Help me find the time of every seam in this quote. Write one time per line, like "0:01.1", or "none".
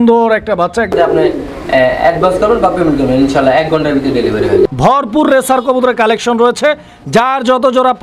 0:00.9
0:04.8